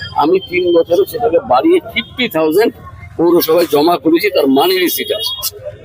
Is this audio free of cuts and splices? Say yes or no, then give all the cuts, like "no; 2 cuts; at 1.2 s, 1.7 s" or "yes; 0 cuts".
yes; 0 cuts